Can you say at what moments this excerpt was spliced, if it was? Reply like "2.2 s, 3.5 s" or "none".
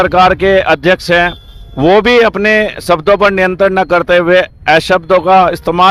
none